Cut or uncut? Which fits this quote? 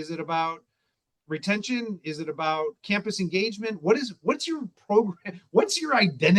uncut